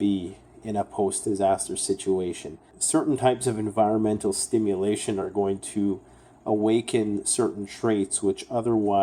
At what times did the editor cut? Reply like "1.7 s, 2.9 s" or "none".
2.8 s

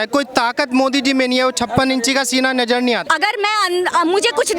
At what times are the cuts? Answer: 3.0 s

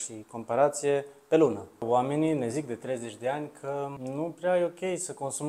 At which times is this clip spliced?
1.8 s, 4.0 s

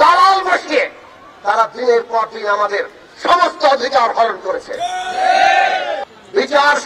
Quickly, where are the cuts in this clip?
5.9 s

